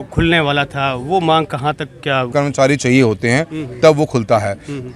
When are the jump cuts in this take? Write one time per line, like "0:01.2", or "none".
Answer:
0:02.3